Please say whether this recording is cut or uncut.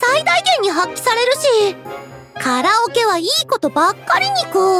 uncut